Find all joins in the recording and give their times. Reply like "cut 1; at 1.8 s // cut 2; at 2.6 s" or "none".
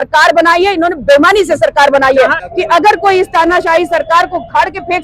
cut 1; at 2.4 s